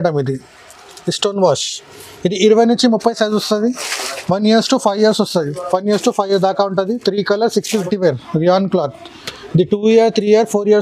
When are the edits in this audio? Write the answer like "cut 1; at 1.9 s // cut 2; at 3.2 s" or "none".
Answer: cut 1; at 7.8 s

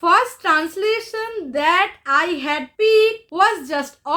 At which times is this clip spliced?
cut 1; at 2.7 s // cut 2; at 3.2 s

